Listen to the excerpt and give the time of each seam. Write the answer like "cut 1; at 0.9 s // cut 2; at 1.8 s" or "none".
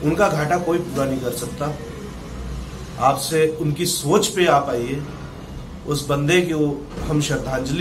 none